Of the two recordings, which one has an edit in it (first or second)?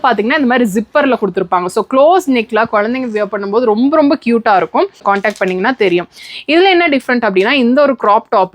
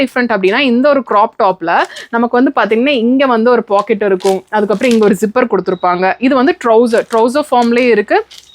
first